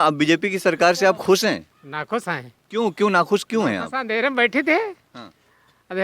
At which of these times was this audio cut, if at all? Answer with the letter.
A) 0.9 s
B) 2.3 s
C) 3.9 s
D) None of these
D